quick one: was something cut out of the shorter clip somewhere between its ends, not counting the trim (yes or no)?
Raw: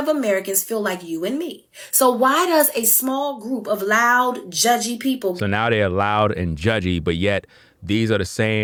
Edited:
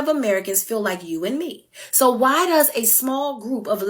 no